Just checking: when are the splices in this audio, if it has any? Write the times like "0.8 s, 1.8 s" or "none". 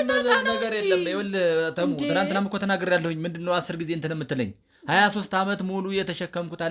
none